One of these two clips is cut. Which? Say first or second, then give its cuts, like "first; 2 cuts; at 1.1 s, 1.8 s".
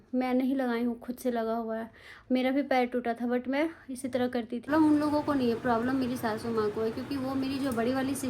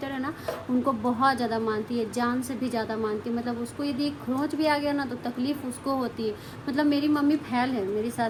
first; 1 cut; at 4.7 s